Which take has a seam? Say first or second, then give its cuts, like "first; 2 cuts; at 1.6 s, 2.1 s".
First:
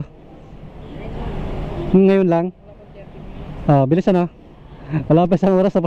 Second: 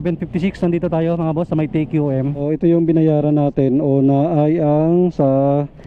second; 1 cut; at 2.4 s